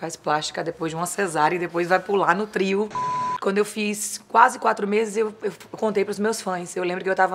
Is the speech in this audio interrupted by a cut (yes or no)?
yes